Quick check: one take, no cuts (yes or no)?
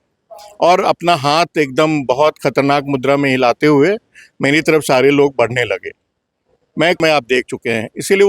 no